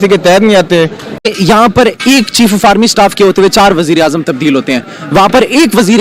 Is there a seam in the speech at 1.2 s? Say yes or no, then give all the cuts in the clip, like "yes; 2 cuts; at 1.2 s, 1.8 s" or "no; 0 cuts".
yes; 1 cut; at 1.2 s